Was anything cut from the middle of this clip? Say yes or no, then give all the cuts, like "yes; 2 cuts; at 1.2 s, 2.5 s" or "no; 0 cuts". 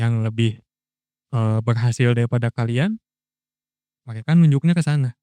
no; 0 cuts